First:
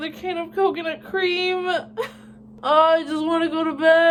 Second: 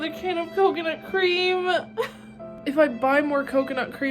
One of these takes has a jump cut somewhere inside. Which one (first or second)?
second